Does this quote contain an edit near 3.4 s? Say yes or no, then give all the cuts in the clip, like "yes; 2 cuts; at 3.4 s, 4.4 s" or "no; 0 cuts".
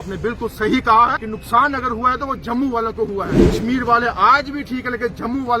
yes; 2 cuts; at 1.3 s, 3.4 s